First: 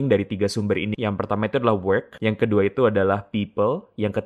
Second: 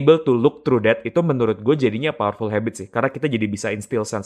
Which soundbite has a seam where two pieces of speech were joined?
first; 2 cuts; at 0.9 s, 2.1 s

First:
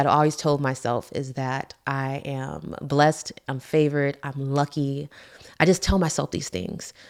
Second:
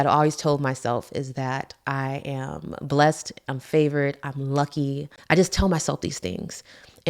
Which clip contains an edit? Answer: second; 1 cut; at 5.1 s

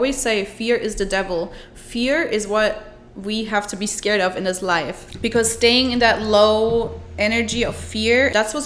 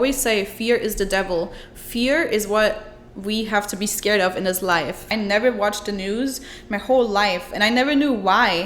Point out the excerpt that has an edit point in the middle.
second; 1 cut; at 5.1 s

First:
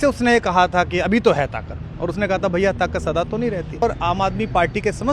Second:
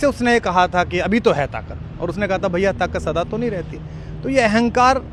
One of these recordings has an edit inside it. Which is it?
first; 1 cut; at 3.8 s

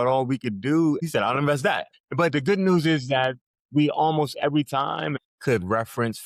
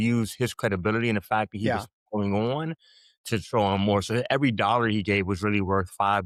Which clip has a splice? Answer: first; 3 cuts; at 1.0 s, 2.0 s, 5.2 s

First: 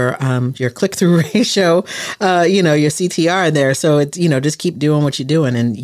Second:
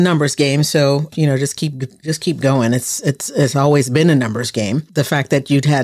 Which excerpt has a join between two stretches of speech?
second; 2 cuts; at 1.1 s, 4.9 s

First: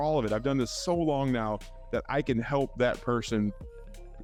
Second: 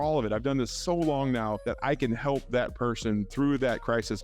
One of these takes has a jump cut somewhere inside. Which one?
second; 2 cuts; at 1.6 s, 3.3 s

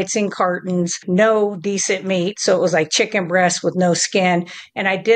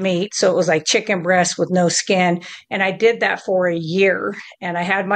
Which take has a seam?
first; 1 cut; at 1.0 s

